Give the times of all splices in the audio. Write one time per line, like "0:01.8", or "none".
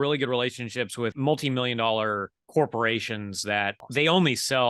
0:01.1
0:03.8